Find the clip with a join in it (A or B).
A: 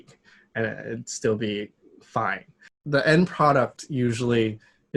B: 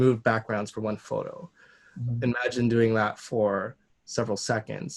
A